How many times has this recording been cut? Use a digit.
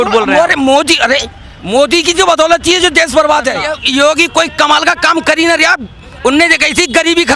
1